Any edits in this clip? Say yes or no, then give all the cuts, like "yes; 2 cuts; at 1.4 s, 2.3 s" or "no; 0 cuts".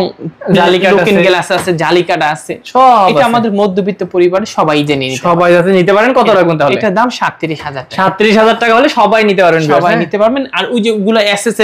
no; 0 cuts